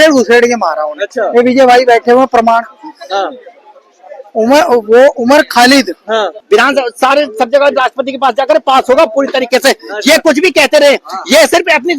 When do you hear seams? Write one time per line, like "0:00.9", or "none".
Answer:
0:06.4